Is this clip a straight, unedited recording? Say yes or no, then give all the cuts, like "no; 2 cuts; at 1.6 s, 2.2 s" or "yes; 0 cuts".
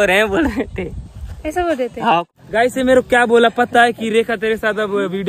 no; 1 cut; at 2.3 s